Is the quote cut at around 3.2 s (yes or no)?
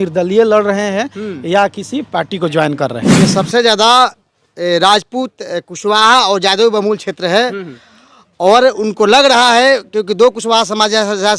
yes